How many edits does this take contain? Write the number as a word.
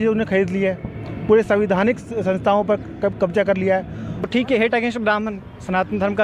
one